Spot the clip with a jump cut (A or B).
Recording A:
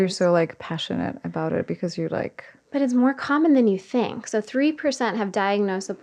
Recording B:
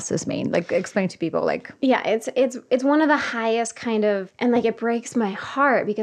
B